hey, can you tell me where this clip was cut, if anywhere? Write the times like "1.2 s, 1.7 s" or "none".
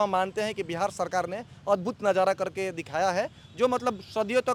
none